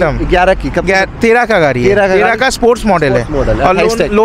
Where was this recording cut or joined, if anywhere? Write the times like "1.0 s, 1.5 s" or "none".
none